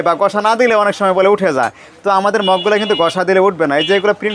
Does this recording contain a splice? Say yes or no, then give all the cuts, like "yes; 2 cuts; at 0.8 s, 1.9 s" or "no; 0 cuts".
no; 0 cuts